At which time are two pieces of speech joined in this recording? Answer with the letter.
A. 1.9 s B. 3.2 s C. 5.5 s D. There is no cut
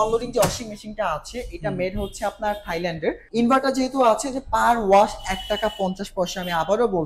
B